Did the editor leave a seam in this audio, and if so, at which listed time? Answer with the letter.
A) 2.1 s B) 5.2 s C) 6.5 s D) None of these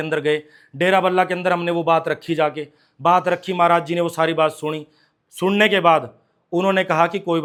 D